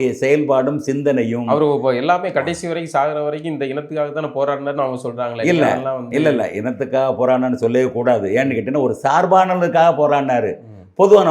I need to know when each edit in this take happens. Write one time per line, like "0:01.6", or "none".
none

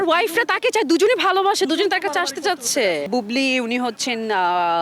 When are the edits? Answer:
0:03.0

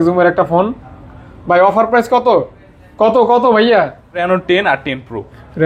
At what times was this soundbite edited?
0:04.2

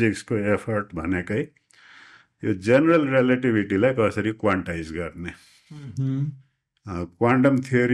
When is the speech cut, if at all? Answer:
none

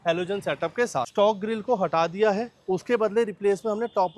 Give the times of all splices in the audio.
0:01.1

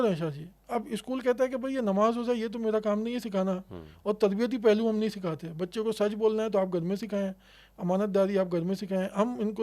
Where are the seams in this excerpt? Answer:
none

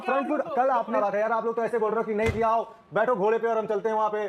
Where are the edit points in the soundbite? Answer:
0:00.9

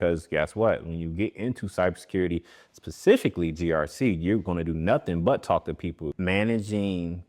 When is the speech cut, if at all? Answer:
0:06.1

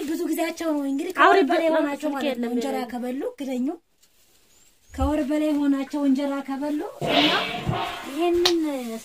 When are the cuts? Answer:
none

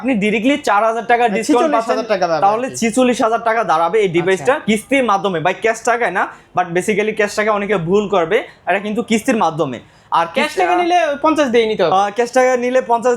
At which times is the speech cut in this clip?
none

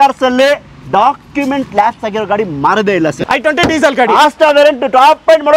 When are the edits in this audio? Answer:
0:03.2

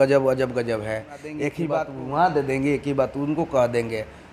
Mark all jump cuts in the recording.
0:01.6

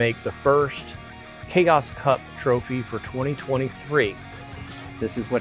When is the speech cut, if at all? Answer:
0:04.3

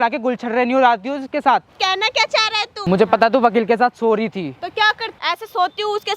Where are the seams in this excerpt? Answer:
0:02.8
0:05.1

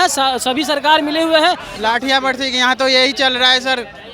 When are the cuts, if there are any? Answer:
0:01.7

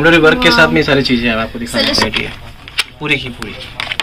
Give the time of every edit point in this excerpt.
0:02.1

